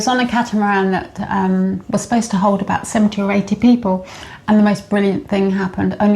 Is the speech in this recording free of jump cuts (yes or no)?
yes